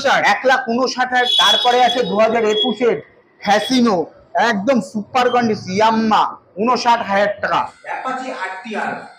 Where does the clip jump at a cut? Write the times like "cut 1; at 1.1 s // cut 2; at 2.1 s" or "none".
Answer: cut 1; at 1.3 s // cut 2; at 7.7 s